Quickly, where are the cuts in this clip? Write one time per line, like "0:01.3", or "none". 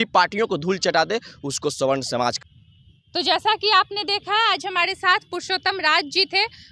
none